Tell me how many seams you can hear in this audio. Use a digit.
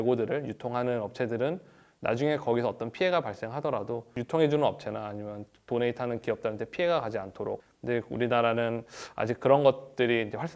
1